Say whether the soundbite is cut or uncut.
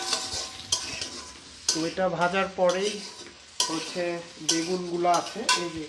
uncut